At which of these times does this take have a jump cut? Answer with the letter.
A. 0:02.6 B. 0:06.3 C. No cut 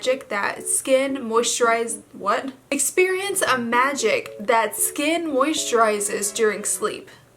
A